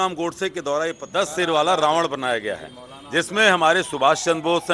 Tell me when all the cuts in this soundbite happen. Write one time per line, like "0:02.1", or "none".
0:01.0